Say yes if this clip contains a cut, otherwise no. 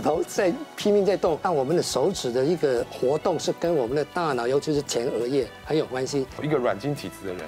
yes